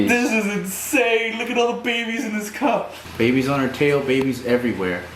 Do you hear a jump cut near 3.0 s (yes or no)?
yes